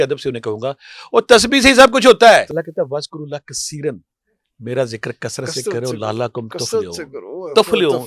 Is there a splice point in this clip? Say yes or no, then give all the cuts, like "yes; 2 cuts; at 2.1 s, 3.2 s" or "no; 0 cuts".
yes; 1 cut; at 2.6 s